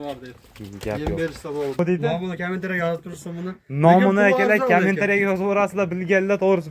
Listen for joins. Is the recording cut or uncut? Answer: cut